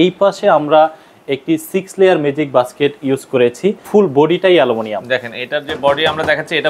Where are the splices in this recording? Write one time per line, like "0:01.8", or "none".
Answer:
0:03.8